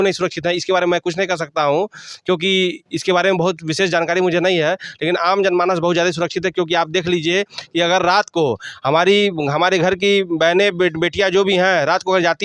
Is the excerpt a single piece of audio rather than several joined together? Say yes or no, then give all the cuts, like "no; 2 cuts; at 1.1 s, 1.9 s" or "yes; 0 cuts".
yes; 0 cuts